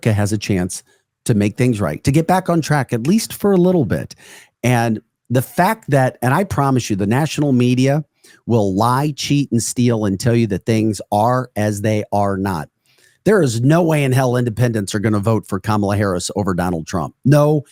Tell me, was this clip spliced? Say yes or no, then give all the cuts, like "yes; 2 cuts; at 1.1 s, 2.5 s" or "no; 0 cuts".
no; 0 cuts